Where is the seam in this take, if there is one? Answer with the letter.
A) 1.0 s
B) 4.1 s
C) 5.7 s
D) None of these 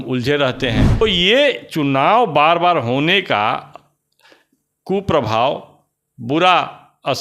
A